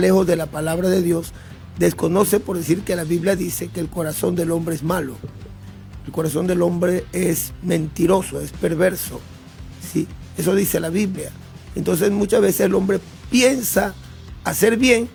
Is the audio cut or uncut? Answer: uncut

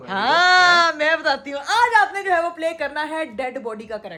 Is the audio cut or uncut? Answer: uncut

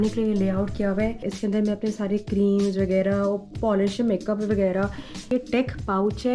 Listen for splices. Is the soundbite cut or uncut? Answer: cut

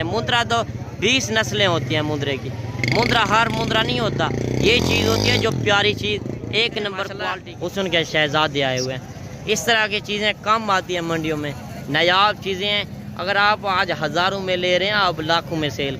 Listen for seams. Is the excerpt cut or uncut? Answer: cut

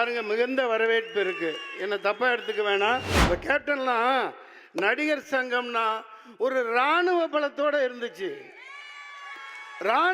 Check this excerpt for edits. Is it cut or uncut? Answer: cut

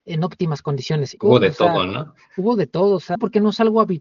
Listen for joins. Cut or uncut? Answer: cut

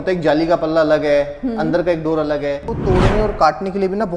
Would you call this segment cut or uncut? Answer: cut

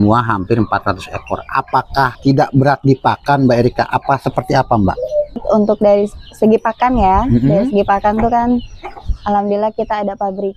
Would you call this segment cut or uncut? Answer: cut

